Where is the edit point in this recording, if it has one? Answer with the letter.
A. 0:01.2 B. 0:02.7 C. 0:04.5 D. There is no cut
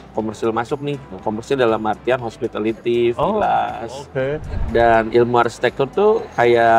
C